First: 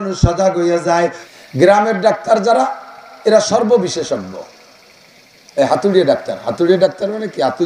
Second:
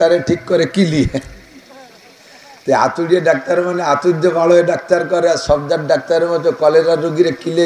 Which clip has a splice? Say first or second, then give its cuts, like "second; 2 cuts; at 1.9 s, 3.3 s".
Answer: first; 1 cut; at 1.2 s